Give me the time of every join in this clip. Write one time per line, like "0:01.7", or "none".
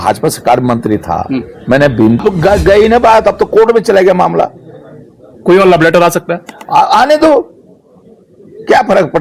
0:02.2